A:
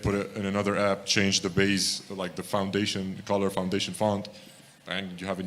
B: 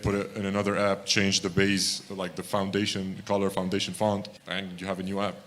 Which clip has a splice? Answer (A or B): B